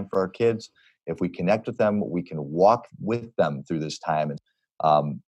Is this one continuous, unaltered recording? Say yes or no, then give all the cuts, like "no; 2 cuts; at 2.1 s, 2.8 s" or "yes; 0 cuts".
no; 1 cut; at 4.4 s